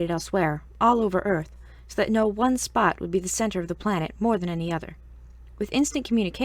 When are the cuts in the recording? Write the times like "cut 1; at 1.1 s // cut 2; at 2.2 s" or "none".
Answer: none

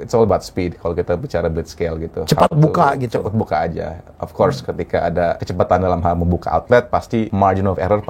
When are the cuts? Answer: cut 1; at 5.5 s // cut 2; at 7.3 s

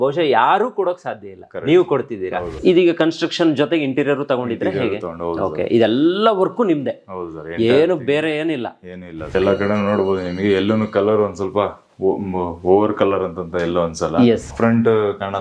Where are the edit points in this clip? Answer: cut 1; at 2.6 s // cut 2; at 9.3 s // cut 3; at 14.5 s

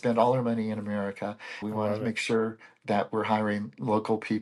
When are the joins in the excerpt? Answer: cut 1; at 1.6 s

